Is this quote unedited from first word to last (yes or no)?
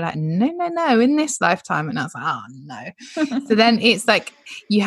yes